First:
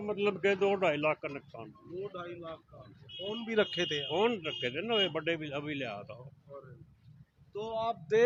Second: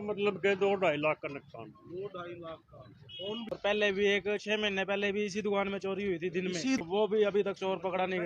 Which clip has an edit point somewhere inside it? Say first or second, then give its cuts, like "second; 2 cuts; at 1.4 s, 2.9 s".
second; 2 cuts; at 3.5 s, 6.8 s